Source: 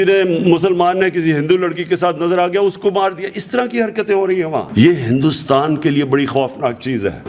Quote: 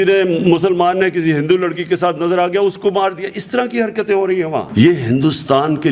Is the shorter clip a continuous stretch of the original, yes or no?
yes